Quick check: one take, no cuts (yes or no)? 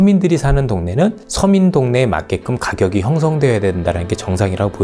yes